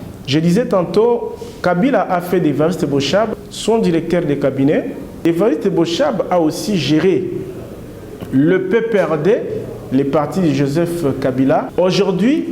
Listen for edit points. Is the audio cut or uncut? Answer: cut